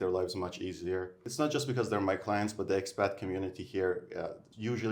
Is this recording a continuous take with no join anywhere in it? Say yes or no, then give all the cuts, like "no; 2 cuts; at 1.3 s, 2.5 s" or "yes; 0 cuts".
no; 1 cut; at 1.2 s